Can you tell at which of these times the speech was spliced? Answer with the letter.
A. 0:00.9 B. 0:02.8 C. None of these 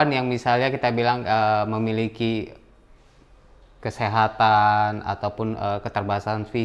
C